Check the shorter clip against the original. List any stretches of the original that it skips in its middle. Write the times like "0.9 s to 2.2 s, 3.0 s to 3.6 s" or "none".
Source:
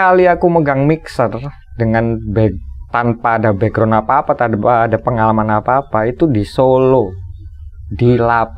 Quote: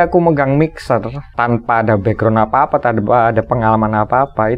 1.5 s to 2.8 s